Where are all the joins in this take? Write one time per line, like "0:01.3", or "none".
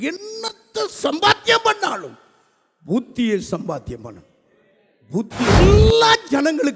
0:05.6